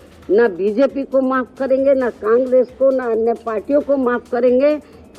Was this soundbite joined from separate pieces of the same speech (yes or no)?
no